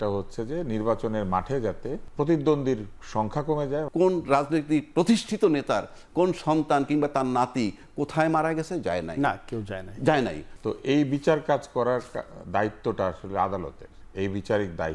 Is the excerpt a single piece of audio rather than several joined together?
no; 3 cuts; at 2.0 s, 3.9 s, 10.5 s

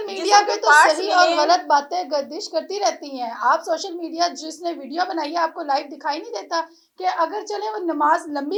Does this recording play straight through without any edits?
yes; 0 cuts

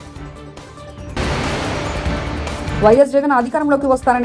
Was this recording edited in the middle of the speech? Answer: yes; 2 cuts; at 1.1 s, 2.7 s

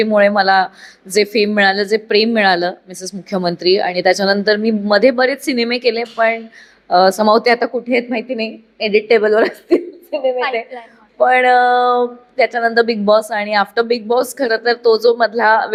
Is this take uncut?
yes; 0 cuts

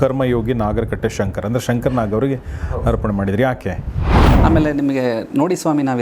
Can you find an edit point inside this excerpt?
yes; 1 cut; at 4.3 s

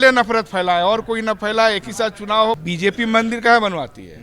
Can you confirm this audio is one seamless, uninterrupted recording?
no; 1 cut; at 2.6 s

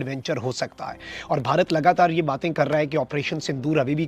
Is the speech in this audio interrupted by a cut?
yes; 1 cut; at 3.0 s

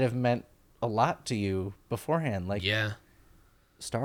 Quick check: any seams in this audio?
no; 0 cuts

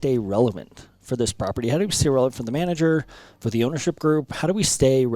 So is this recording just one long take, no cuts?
yes; 0 cuts

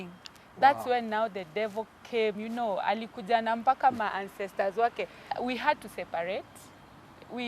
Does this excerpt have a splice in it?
yes; 1 cut; at 5.4 s

